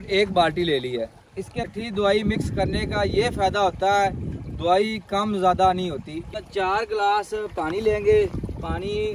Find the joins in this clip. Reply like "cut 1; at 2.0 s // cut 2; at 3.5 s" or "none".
cut 1; at 1.7 s // cut 2; at 6.3 s